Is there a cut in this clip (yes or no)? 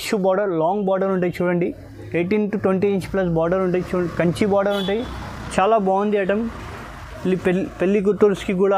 no